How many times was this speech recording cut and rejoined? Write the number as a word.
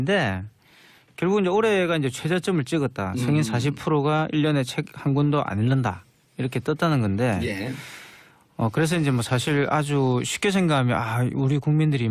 one